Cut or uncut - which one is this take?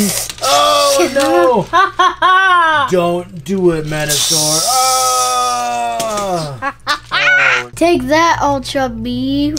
cut